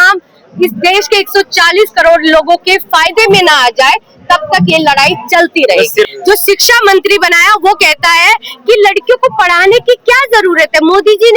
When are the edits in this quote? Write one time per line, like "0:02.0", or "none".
0:06.1

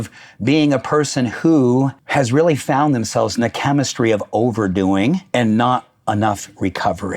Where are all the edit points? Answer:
0:02.0
0:05.2

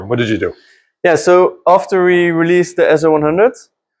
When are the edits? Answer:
none

